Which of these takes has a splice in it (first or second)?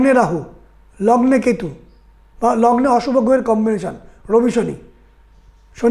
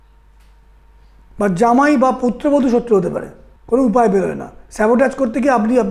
second